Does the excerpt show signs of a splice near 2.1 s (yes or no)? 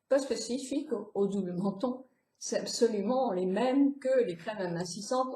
no